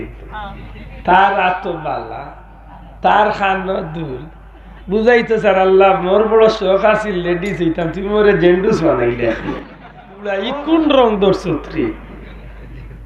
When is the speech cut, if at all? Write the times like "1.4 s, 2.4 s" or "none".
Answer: 10.4 s

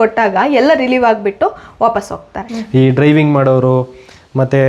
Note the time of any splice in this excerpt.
2.5 s

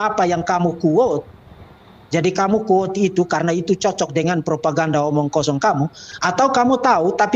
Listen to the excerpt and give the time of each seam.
none

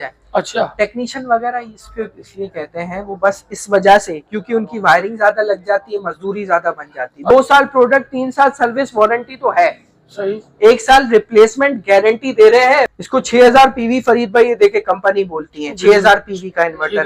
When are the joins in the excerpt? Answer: 7.3 s, 12.9 s

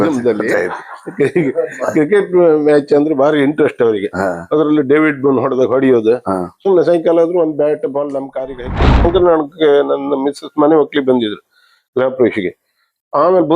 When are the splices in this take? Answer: 9.0 s

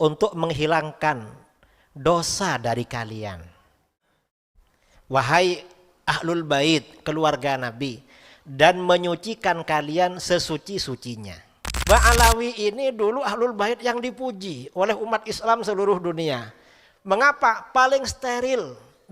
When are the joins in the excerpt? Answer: 11.8 s

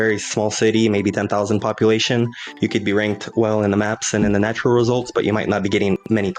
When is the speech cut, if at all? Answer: none

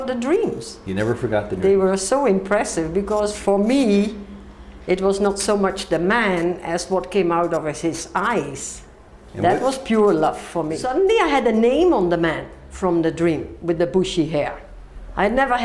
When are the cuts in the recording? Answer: 10.8 s

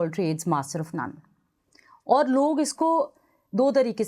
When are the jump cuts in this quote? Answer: none

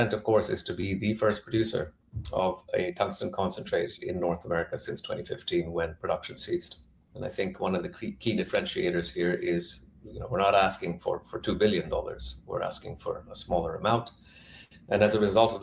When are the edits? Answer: 7.1 s

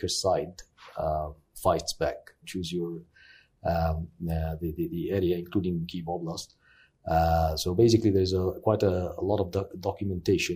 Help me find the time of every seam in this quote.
2.4 s

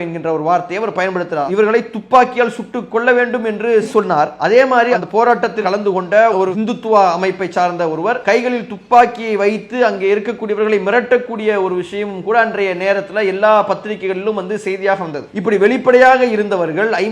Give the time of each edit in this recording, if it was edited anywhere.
5.6 s, 8.2 s

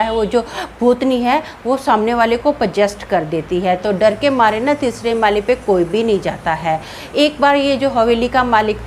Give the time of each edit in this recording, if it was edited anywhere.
none

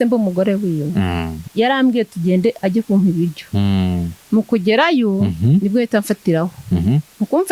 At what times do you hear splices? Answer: 1.4 s

